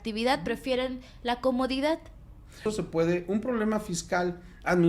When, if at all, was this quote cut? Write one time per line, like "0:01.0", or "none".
0:02.6